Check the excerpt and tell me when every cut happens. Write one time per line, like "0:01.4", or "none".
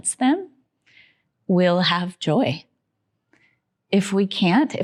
none